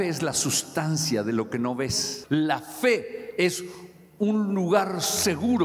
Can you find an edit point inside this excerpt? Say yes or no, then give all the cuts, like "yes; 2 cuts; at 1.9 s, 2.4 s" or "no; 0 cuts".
yes; 1 cut; at 2.1 s